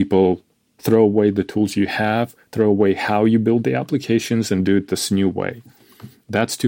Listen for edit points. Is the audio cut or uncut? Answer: uncut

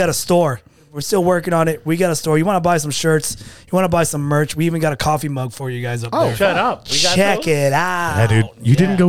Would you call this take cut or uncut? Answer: cut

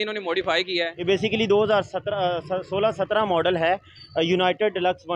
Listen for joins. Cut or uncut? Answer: cut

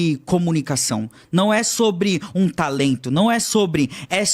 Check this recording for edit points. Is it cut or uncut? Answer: uncut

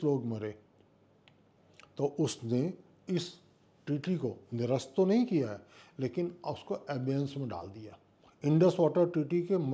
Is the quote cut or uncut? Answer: uncut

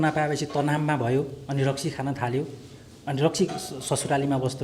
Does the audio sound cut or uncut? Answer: uncut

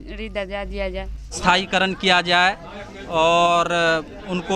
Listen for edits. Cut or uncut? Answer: cut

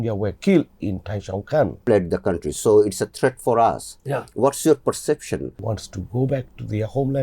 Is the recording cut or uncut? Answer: cut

